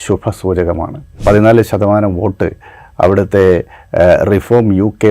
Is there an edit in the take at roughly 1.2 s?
yes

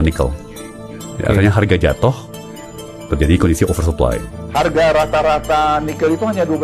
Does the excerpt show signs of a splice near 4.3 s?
yes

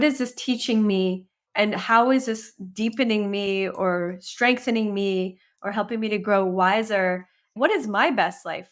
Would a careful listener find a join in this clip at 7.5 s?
yes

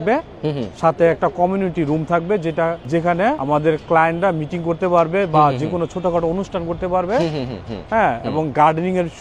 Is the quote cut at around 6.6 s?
no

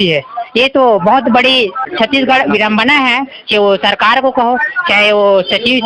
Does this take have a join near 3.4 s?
no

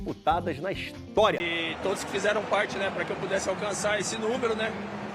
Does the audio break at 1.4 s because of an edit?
yes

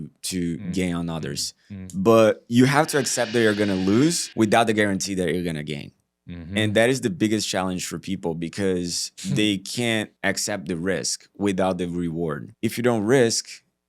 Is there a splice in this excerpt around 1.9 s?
no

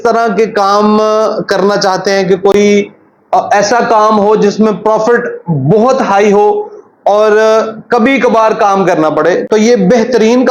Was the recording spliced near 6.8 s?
no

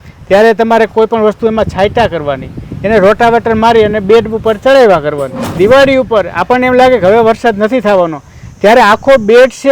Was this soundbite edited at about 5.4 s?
yes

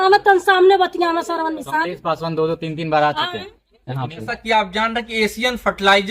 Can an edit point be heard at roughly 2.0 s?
no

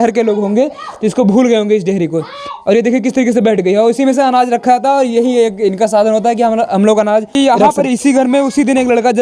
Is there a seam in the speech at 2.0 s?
no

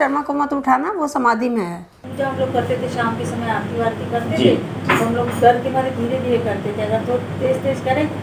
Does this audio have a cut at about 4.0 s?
no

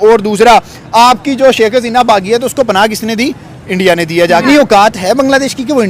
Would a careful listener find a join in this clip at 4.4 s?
yes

